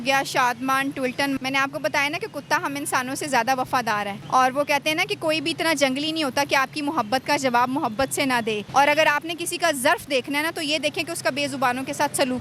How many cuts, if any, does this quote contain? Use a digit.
2